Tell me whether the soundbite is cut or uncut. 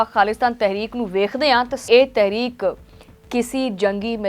cut